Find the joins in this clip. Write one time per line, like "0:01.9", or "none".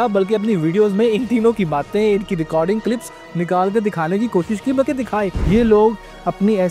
0:05.4